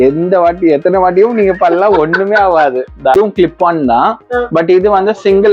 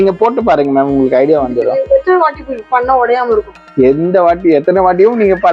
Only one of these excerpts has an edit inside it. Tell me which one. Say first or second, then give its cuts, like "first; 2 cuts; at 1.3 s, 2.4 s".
first; 1 cut; at 3.1 s